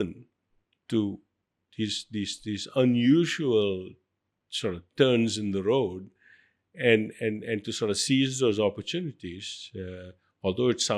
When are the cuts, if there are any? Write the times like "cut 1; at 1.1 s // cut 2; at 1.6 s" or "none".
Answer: none